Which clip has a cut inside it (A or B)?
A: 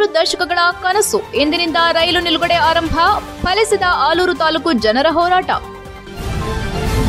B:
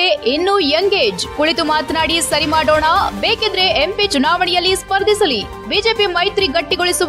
A